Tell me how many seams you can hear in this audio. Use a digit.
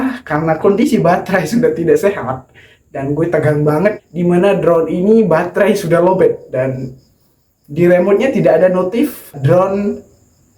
2